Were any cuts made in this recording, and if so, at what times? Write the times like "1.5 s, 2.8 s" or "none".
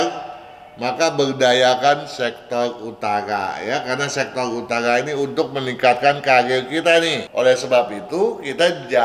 7.2 s

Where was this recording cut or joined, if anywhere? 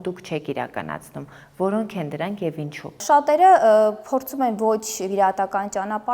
3.0 s

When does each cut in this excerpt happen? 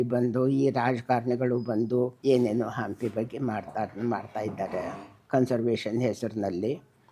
2.2 s

